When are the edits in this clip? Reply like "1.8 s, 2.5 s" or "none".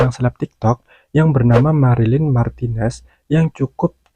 none